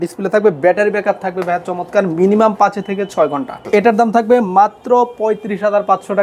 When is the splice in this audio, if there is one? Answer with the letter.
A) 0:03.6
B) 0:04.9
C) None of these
A